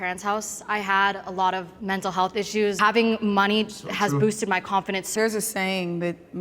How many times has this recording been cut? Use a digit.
2